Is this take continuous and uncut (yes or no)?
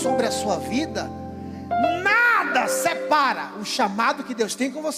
yes